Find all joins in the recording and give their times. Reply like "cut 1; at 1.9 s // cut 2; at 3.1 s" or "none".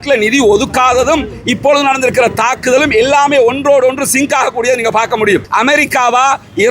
cut 1; at 5.5 s